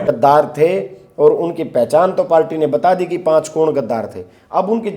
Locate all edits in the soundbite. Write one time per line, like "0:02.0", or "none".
none